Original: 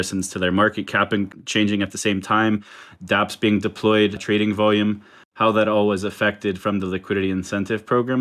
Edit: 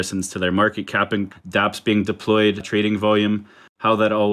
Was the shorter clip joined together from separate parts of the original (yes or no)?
yes